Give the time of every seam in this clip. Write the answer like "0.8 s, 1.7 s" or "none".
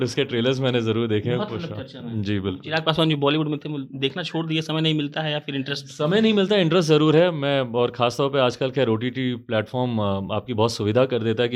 none